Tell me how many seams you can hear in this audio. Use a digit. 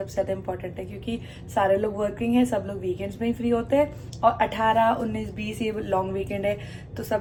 0